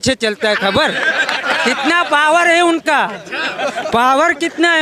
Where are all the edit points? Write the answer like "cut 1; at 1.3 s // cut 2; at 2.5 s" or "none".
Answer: none